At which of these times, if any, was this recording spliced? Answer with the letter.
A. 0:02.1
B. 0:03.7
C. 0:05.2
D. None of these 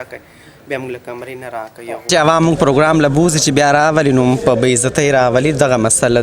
A